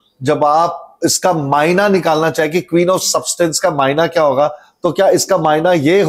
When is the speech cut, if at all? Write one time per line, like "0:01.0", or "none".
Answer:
none